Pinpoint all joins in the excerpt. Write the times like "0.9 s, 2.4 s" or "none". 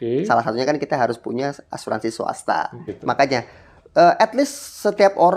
2.9 s

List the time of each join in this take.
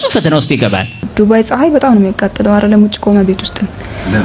1.1 s

